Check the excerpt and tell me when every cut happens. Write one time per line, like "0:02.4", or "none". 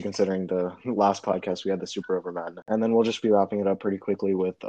0:02.7